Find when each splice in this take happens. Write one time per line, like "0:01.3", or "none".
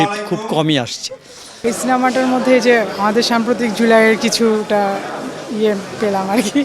0:01.5